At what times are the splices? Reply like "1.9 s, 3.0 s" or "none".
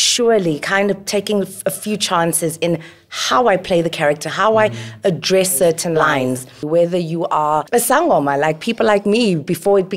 6.5 s, 7.6 s